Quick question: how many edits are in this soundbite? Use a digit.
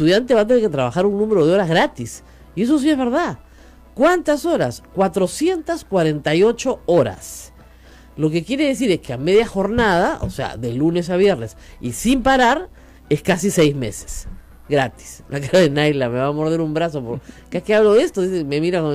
0